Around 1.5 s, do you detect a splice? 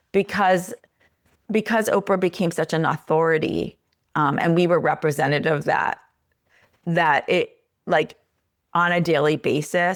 no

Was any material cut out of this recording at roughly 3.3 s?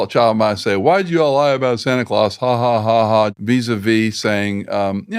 yes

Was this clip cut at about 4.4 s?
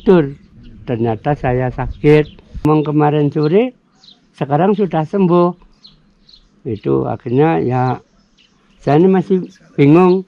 no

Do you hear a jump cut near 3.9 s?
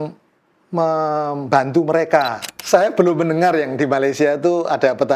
no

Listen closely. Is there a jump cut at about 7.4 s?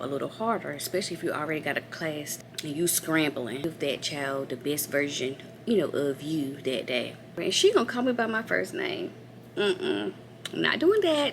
yes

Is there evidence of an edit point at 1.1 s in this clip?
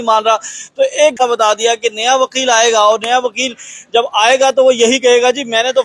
yes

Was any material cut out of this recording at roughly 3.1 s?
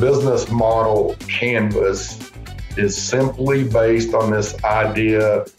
no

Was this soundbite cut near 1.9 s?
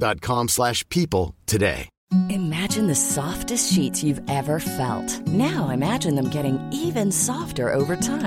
yes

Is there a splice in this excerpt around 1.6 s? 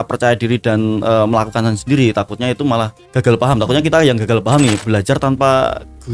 no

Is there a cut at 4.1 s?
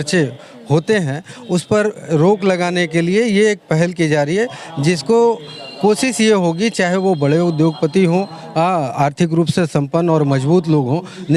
no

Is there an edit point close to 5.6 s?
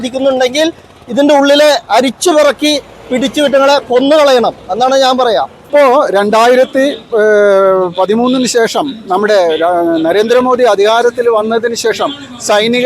yes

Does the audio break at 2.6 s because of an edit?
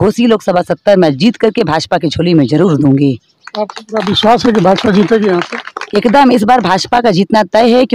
no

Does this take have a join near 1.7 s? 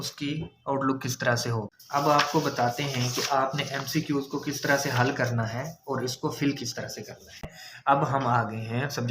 yes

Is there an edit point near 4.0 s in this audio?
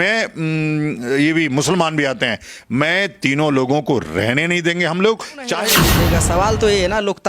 no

